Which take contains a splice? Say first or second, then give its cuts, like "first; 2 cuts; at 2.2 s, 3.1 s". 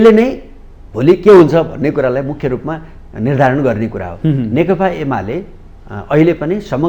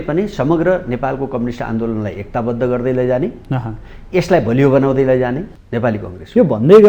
second; 1 cut; at 5.5 s